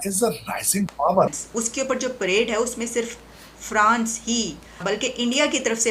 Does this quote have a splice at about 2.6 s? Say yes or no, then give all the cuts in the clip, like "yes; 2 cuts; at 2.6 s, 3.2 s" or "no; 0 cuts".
no; 2 cuts; at 1.3 s, 4.8 s